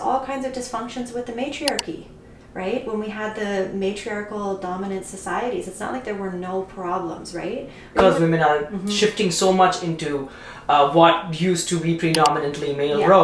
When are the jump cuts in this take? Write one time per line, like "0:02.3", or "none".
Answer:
0:08.0